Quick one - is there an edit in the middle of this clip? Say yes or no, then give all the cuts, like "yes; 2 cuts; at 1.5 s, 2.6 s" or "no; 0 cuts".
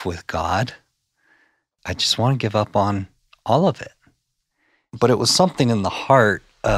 yes; 1 cut; at 4.8 s